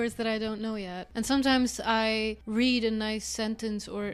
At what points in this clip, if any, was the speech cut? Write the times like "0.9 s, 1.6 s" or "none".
1.0 s, 2.4 s